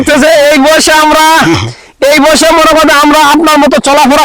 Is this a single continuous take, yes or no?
yes